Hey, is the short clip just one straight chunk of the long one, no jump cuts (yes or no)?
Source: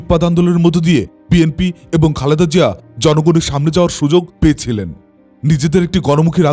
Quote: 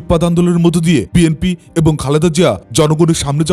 no